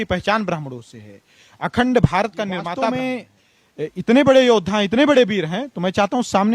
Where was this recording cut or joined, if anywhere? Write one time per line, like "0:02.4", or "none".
0:02.7